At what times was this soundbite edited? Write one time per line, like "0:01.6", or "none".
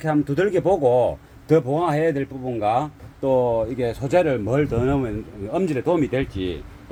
none